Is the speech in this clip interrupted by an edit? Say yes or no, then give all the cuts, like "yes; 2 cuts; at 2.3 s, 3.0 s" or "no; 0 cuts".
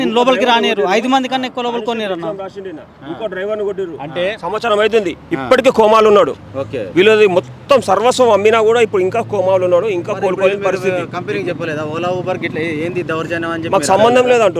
no; 0 cuts